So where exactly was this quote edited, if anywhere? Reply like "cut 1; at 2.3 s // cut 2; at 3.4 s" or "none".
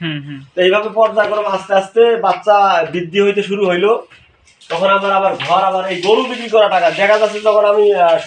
none